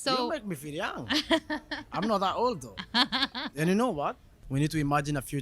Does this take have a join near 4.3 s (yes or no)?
yes